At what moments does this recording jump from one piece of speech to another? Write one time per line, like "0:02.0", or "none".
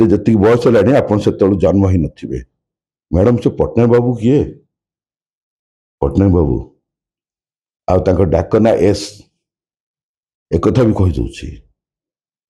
none